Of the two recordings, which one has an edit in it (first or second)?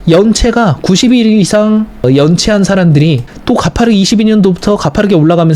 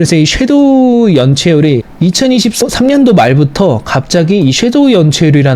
first